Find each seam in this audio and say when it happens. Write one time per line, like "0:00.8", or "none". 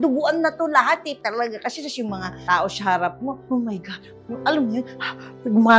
0:01.2